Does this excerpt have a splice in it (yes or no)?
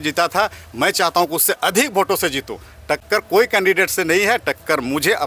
no